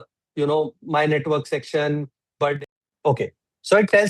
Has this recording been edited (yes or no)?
yes